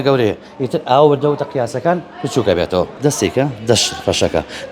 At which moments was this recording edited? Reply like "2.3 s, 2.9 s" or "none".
2.9 s